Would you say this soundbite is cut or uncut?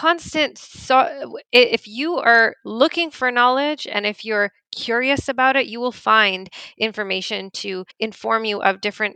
cut